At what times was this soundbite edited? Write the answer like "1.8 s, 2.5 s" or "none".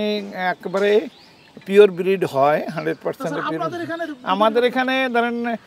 none